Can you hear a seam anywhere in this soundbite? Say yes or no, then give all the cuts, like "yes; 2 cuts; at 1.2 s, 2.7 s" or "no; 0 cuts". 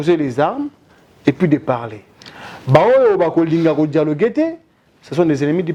no; 0 cuts